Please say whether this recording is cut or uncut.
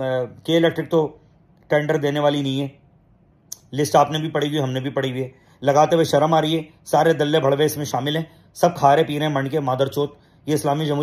uncut